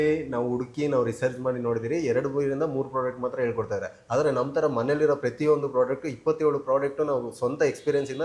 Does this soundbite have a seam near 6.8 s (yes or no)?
no